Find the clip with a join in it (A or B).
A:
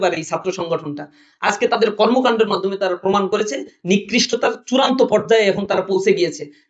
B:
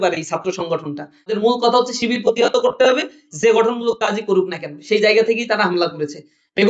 B